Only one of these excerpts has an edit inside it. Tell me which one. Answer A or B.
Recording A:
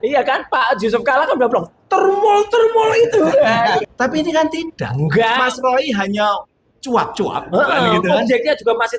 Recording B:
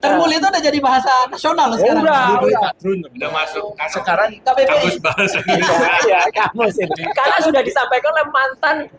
A